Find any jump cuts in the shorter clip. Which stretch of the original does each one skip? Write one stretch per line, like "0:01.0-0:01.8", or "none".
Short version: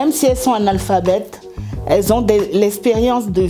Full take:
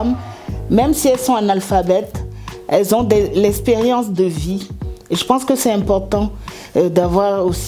none